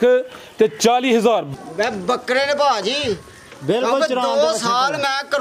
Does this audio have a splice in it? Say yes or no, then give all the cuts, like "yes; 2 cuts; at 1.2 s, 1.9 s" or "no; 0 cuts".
yes; 1 cut; at 1.5 s